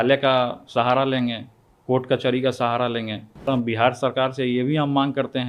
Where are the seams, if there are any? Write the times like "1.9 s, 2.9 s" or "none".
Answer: 3.5 s